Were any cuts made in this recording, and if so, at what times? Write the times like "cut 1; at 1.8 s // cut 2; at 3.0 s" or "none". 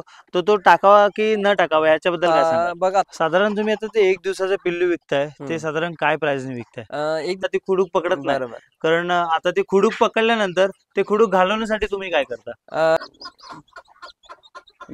cut 1; at 3.1 s // cut 2; at 7.5 s // cut 3; at 13.0 s